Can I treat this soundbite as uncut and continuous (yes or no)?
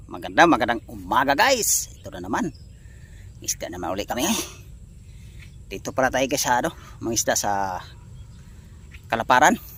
yes